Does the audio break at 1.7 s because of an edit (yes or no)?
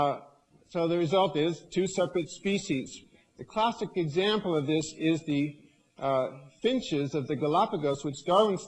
no